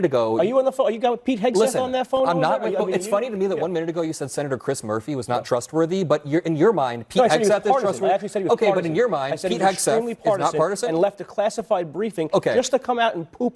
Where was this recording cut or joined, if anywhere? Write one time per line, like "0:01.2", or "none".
none